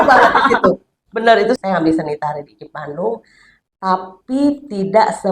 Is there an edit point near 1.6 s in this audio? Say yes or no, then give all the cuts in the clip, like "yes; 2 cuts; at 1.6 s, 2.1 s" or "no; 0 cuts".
yes; 1 cut; at 1.6 s